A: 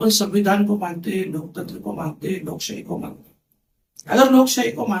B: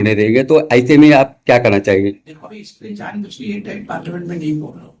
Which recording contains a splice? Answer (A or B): B